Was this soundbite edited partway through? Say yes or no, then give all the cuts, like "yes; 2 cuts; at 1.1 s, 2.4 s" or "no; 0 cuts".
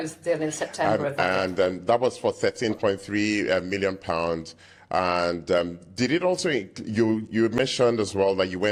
no; 0 cuts